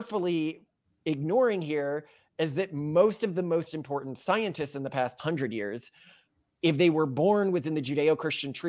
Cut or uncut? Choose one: cut